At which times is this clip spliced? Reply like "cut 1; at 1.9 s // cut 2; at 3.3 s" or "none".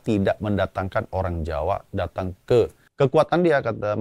cut 1; at 2.8 s